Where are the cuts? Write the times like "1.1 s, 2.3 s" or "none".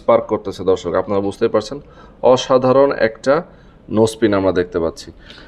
none